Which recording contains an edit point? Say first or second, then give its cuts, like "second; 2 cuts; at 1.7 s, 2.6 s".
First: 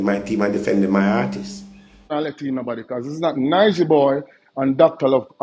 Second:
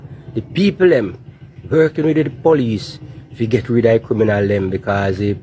first; 1 cut; at 2.1 s